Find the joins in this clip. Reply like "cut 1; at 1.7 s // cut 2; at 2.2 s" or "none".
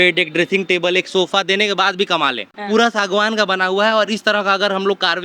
cut 1; at 2.5 s